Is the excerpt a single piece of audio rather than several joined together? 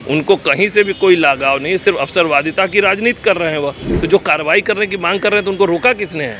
no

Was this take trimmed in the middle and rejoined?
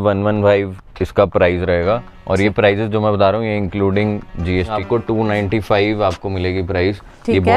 yes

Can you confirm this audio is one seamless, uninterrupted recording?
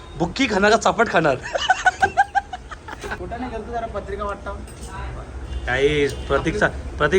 no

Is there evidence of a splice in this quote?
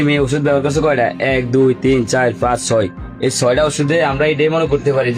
no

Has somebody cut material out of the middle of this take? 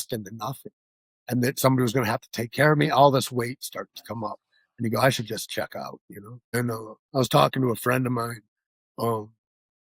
yes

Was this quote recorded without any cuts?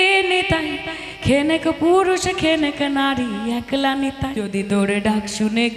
no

